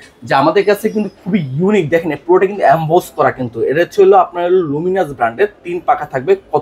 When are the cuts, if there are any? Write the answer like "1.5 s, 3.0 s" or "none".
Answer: none